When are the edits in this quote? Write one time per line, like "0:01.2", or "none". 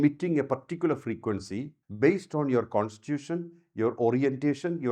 0:01.8